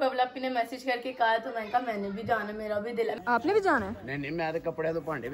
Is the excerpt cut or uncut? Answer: cut